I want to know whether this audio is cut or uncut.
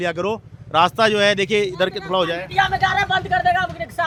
uncut